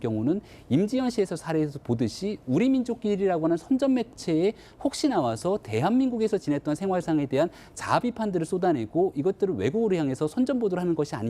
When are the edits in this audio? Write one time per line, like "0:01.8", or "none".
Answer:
0:03.0